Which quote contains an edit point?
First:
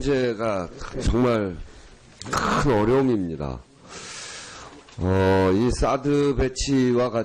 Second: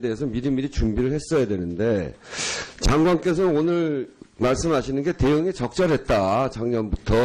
second; 1 cut; at 5.2 s

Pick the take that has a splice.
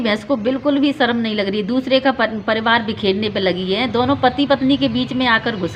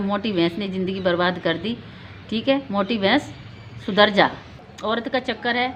second; 1 cut; at 4.7 s

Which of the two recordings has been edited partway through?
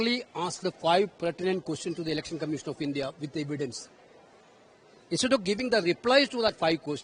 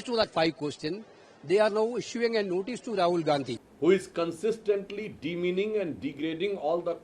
second; 1 cut; at 3.6 s

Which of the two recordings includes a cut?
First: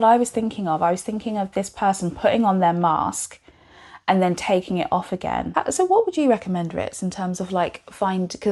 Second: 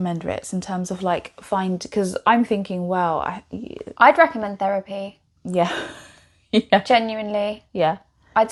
first; 1 cut; at 5.5 s

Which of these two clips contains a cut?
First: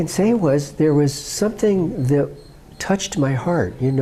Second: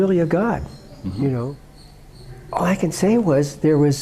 second; 1 cut; at 1.6 s

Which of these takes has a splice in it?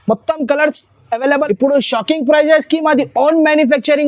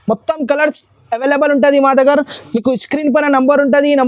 first; 1 cut; at 1.4 s

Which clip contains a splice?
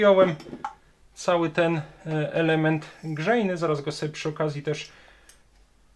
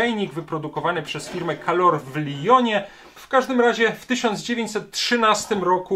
second; 1 cut; at 3.2 s

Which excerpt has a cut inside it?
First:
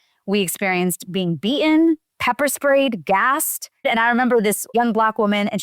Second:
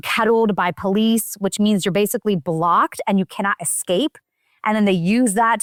first; 1 cut; at 3.9 s

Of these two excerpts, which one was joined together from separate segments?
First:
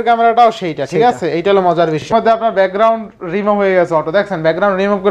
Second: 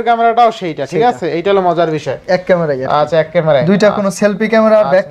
first; 1 cut; at 2.1 s

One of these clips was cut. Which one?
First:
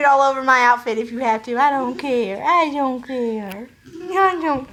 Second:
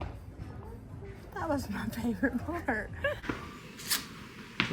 second; 1 cut; at 3.2 s

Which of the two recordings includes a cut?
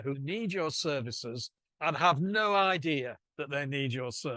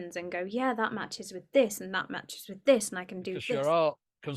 second; 1 cut; at 3.3 s

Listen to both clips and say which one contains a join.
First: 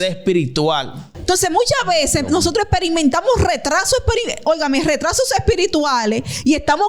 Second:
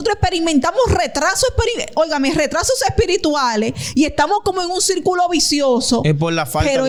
first; 1 cut; at 1.1 s

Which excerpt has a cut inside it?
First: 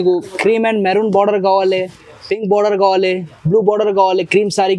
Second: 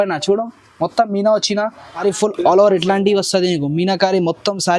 second; 1 cut; at 2.0 s

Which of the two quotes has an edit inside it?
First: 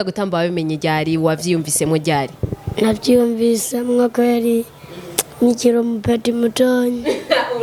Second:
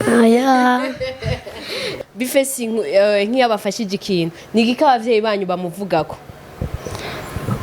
second; 1 cut; at 1.9 s

